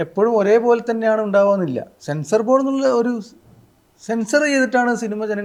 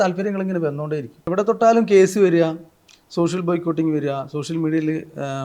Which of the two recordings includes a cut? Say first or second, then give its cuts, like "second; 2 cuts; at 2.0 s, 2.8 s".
second; 1 cut; at 1.3 s